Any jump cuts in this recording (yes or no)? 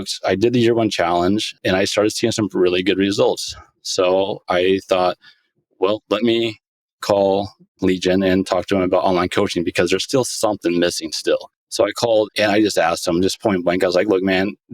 yes